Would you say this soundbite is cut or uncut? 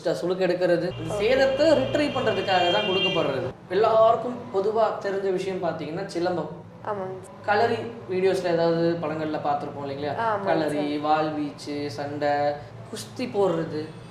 cut